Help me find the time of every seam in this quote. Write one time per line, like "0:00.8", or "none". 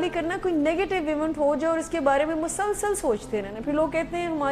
none

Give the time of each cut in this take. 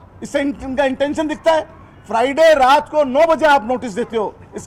none

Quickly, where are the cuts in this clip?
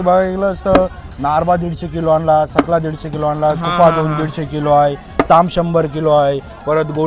none

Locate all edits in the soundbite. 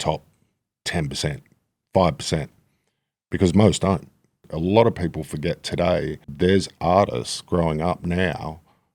0:04.5
0:06.2

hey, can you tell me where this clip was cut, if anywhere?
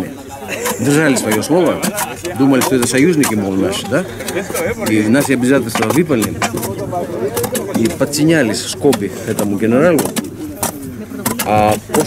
0:06.2

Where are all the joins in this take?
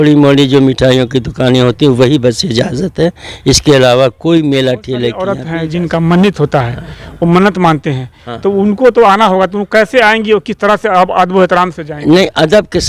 0:05.2

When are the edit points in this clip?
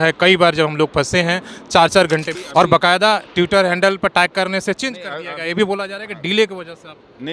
0:02.4

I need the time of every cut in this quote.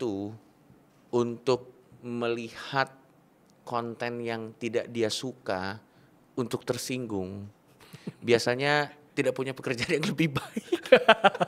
0:09.0

